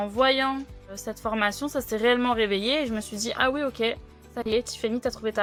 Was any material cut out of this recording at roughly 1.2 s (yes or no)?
no